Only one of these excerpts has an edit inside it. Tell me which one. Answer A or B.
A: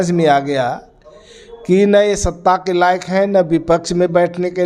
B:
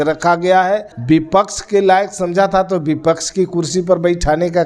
B